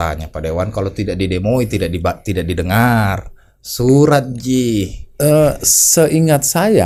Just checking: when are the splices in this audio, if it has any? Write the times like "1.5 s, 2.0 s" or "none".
none